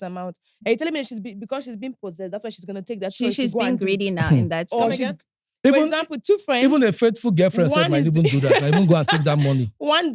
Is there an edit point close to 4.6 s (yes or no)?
no